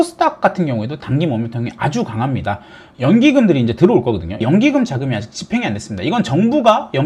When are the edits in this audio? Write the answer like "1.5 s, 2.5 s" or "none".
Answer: none